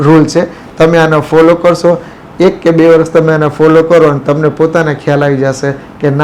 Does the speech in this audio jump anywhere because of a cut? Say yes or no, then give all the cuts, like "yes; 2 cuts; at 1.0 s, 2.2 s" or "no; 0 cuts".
no; 0 cuts